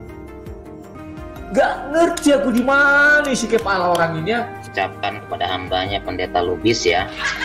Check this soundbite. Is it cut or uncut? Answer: cut